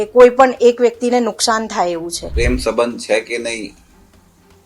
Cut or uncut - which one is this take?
cut